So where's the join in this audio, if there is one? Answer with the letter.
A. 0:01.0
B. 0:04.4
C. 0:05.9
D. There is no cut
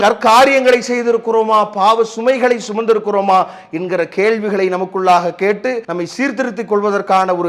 C